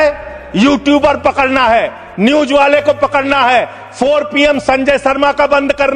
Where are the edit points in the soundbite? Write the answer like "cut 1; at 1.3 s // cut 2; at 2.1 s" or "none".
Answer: none